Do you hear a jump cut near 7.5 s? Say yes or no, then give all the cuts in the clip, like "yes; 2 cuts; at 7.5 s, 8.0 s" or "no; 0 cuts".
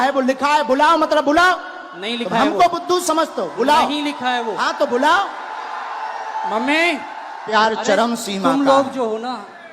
yes; 1 cut; at 7.5 s